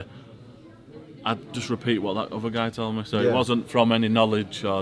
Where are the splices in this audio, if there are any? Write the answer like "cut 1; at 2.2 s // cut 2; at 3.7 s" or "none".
none